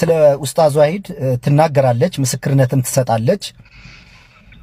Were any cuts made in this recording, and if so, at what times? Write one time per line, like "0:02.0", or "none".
none